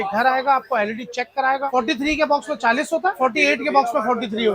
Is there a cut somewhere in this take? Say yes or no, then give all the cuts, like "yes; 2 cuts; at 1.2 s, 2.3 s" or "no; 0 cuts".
yes; 1 cut; at 1.7 s